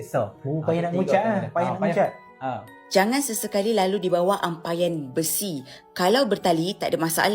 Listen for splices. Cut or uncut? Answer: cut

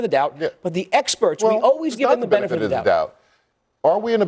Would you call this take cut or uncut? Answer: uncut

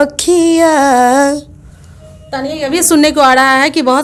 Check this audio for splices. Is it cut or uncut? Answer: uncut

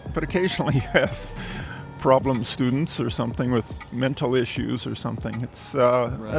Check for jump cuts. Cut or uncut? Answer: uncut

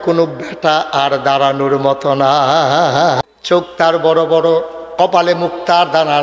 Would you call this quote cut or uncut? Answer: cut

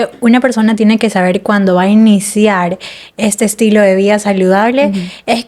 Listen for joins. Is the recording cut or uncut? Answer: uncut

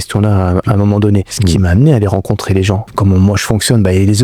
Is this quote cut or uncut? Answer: cut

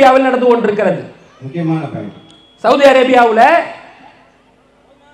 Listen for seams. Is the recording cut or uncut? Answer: uncut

